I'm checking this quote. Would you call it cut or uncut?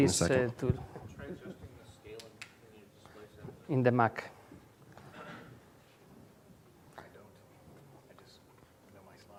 uncut